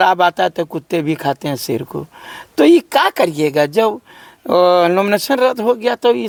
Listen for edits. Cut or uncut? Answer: uncut